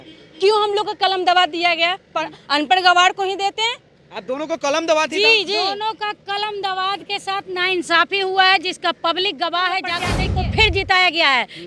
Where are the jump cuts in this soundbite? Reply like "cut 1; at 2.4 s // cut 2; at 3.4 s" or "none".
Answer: cut 1; at 10.1 s